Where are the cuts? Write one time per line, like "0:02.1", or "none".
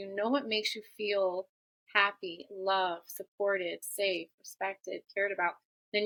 none